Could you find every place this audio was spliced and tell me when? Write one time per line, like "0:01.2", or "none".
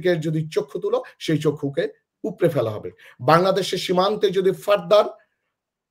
none